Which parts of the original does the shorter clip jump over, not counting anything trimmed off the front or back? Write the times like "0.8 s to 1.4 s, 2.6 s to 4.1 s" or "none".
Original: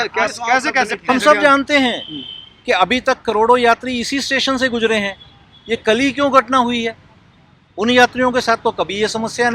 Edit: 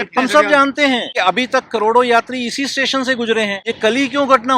2.0 s to 2.6 s, 5.1 s to 5.6 s